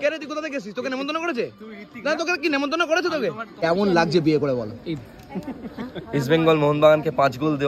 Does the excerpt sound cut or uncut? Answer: cut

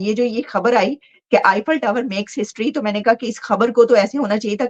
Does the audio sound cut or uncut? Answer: uncut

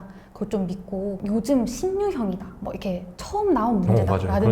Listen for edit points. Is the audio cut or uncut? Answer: cut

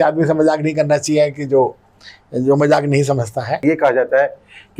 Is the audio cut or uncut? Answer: cut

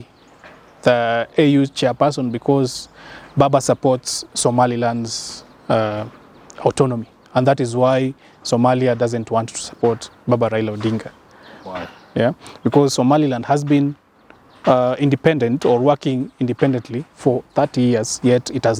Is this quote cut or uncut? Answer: uncut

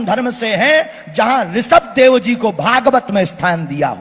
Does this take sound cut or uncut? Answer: uncut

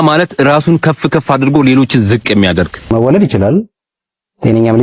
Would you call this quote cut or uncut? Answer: cut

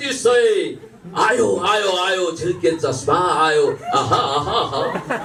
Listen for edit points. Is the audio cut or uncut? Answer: uncut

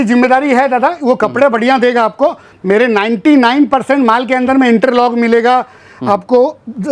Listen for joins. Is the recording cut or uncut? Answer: uncut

